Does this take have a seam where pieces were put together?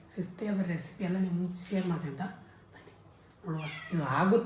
no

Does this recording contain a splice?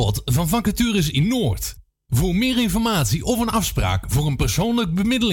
no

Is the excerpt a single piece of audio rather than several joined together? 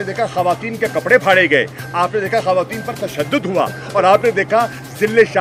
yes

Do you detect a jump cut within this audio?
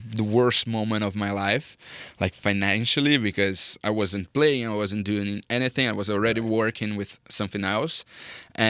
no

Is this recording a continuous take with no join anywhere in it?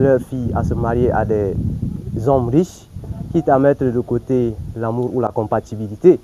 yes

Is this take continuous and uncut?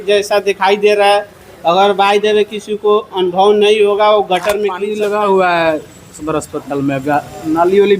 no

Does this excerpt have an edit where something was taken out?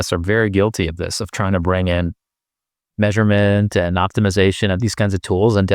no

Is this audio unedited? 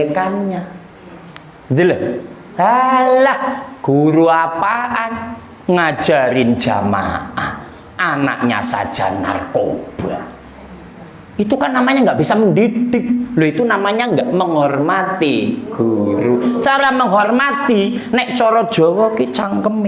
yes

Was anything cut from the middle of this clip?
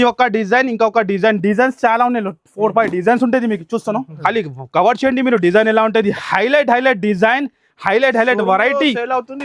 yes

